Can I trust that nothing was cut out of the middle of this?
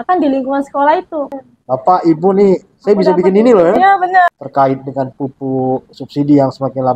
no; 2 cuts; at 1.3 s, 4.3 s

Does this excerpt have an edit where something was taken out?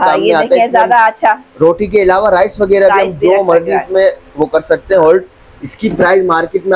no; 0 cuts

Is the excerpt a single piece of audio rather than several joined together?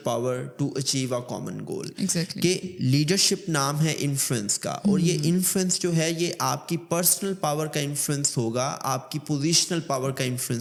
yes; 0 cuts

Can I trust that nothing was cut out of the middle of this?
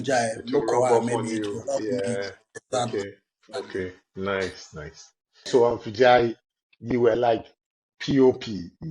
no; 1 cut; at 5.5 s

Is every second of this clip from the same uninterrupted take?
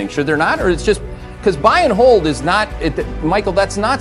yes; 0 cuts

